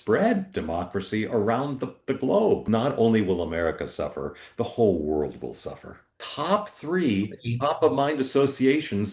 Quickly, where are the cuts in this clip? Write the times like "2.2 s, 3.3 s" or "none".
2.6 s, 6.2 s